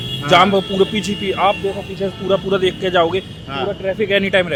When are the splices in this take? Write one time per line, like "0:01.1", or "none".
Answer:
none